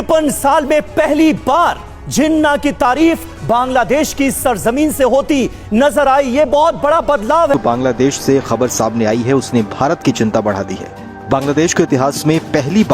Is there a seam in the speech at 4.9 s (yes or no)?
no